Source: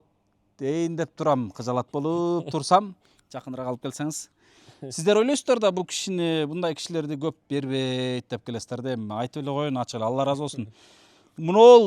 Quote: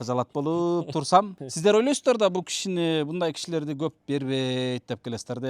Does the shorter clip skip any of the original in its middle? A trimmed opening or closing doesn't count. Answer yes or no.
yes